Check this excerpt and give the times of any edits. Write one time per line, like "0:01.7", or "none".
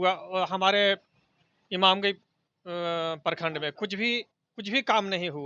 none